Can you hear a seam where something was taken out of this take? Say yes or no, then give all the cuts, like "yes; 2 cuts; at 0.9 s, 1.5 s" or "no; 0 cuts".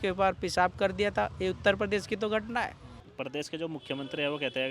yes; 1 cut; at 3.1 s